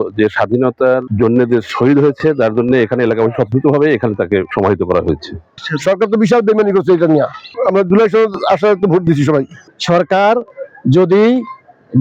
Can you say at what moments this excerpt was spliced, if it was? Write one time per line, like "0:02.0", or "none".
0:01.1
0:04.5
0:05.5
0:09.6

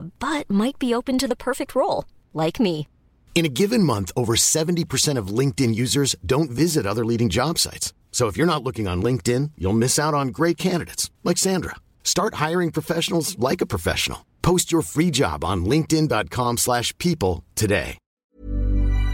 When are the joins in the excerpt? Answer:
0:18.2

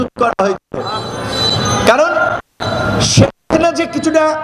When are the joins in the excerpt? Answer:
none

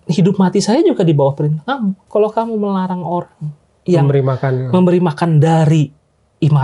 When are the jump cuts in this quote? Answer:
0:02.0

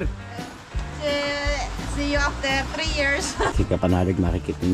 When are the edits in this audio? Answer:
0:03.5

